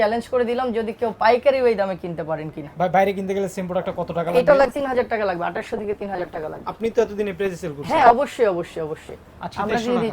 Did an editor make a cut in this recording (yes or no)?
no